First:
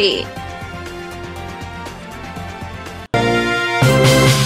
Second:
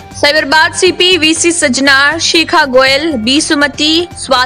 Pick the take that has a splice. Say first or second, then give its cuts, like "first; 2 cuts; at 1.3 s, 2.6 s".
first; 1 cut; at 3.1 s